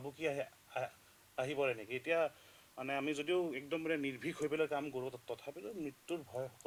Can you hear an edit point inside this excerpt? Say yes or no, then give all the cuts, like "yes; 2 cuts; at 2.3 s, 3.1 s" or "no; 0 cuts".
no; 0 cuts